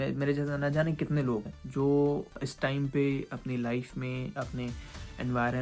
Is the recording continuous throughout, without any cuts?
no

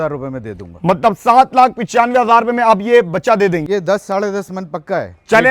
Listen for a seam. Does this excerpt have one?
yes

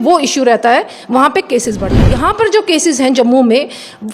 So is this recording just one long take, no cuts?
no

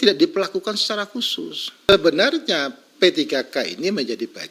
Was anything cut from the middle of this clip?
yes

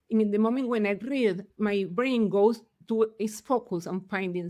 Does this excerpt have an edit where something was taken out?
yes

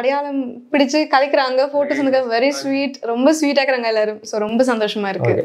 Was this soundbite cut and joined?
no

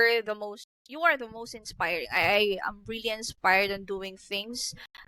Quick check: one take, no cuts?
yes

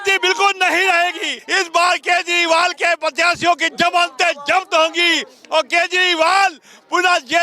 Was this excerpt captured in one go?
no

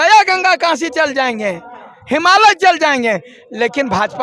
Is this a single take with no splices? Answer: yes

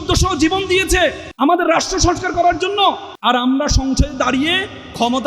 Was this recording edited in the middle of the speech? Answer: yes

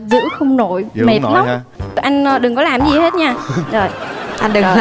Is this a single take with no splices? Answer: no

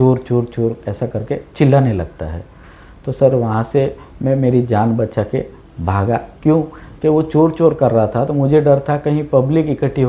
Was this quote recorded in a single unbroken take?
yes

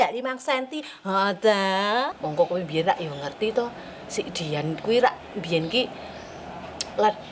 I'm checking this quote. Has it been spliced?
no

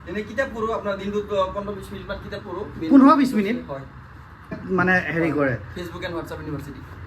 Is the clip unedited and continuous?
no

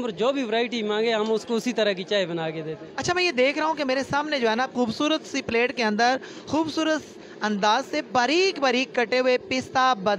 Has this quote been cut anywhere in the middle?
no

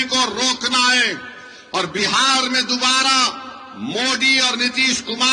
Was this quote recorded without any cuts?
yes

